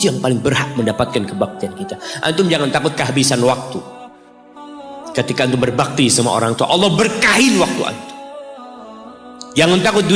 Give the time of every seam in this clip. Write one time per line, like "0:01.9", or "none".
none